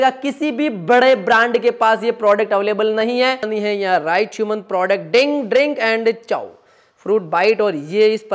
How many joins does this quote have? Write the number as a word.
one